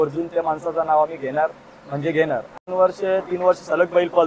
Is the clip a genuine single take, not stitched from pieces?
no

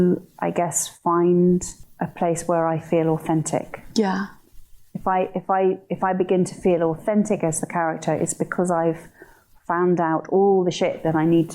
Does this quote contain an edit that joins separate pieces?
yes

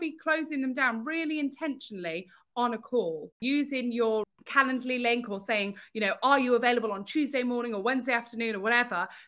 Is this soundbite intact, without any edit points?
no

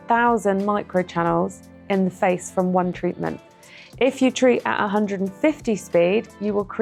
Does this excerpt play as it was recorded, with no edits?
yes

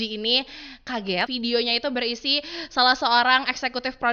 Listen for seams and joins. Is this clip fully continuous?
no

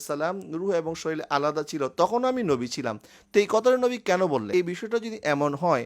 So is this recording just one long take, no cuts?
no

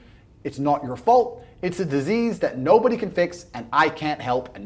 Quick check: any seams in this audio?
no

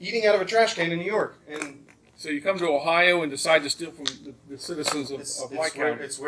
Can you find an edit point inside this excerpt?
yes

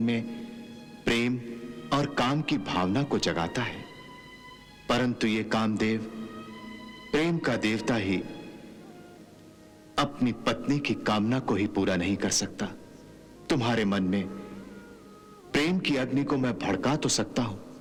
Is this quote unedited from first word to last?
yes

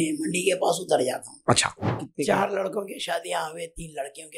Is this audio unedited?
no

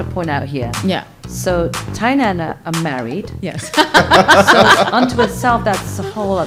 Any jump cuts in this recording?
no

